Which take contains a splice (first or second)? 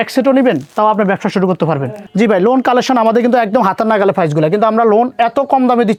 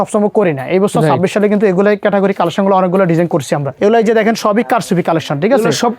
second